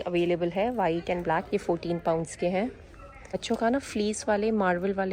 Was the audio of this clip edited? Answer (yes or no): yes